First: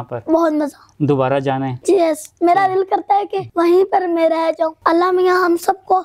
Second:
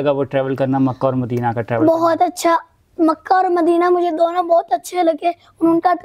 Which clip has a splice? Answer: first; 3 cuts; at 1.7 s, 3.4 s, 4.8 s

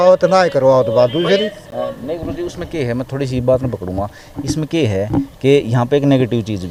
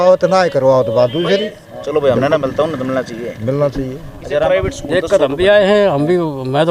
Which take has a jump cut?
second; 2 cuts; at 1.7 s, 4.4 s

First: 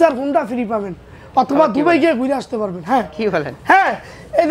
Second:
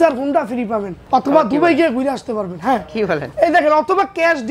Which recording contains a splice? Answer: second; 2 cuts; at 0.9 s, 3.3 s

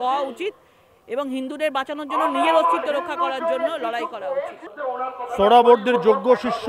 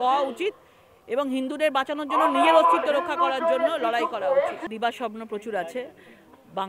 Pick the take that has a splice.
first; 1 cut; at 4.6 s

